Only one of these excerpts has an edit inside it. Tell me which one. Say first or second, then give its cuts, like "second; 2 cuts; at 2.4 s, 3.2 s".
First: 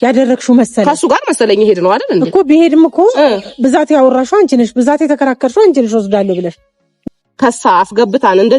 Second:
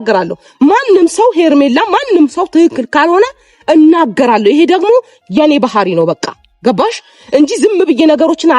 first; 1 cut; at 7.0 s